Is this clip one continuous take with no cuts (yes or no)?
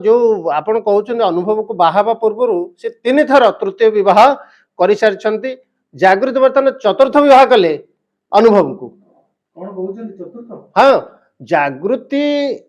yes